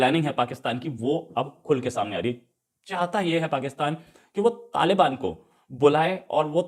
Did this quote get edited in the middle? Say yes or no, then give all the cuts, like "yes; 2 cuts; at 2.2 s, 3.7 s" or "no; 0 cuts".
no; 0 cuts